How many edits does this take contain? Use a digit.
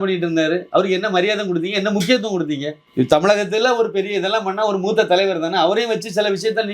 1